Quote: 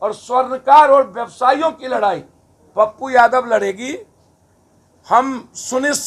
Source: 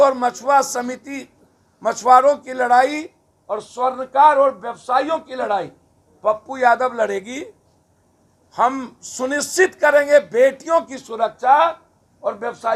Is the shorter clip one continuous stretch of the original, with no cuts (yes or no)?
yes